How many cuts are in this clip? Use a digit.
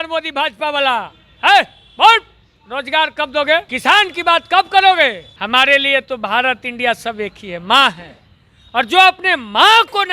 2